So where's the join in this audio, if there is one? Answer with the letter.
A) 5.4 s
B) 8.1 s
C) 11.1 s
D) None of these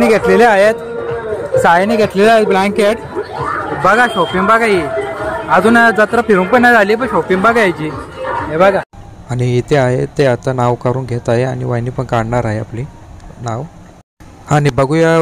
D